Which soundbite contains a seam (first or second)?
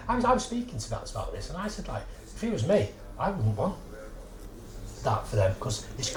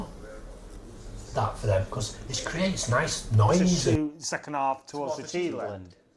second